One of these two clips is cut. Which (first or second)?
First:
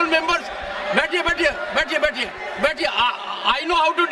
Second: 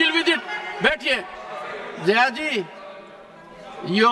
second